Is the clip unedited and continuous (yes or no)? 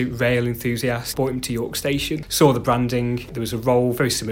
no